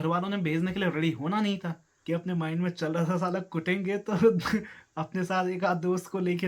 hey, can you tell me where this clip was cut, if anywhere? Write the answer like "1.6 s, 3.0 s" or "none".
1.9 s